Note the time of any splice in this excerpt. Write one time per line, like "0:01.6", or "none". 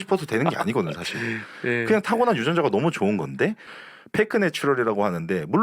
0:03.7